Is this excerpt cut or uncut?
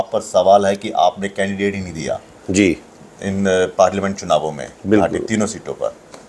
uncut